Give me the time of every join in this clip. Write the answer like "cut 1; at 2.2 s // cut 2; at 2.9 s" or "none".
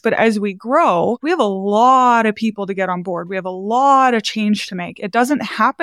none

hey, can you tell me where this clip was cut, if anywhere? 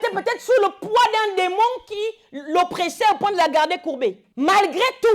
cut 1; at 4.3 s

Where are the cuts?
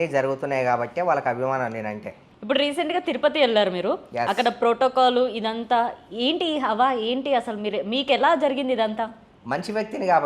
cut 1; at 2.3 s

